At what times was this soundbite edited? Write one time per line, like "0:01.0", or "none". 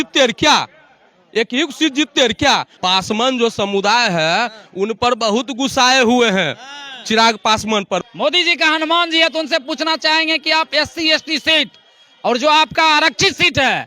0:02.7
0:08.0

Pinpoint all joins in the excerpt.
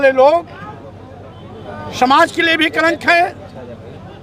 none

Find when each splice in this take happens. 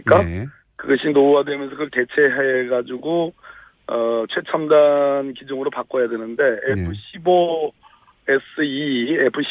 0:07.7

